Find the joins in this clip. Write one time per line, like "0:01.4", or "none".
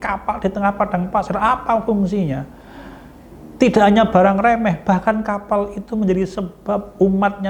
none

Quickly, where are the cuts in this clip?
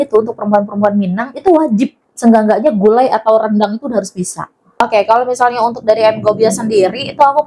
0:04.7

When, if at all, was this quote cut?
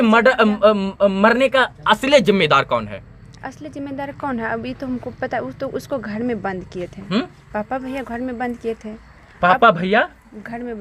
none

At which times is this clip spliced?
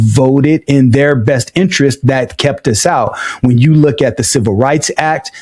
none

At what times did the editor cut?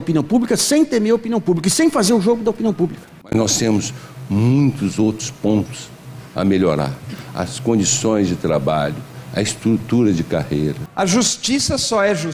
0:03.0
0:10.8

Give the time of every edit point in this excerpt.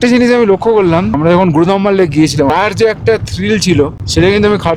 none

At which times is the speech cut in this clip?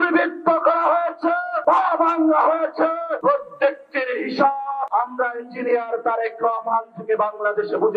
0:01.5
0:03.1
0:04.9

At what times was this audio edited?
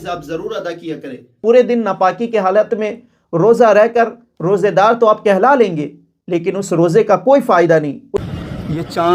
0:01.4
0:08.1

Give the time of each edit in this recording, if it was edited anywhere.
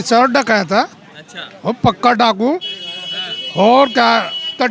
none

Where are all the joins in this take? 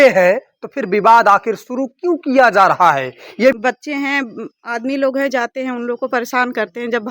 0:03.5

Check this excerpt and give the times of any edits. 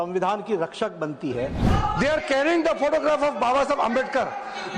0:01.6

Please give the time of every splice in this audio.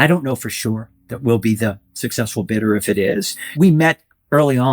0:03.6

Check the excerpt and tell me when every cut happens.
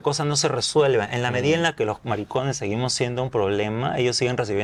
none

